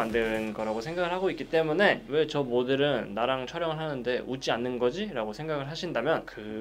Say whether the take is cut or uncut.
uncut